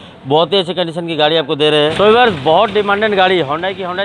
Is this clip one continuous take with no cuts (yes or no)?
no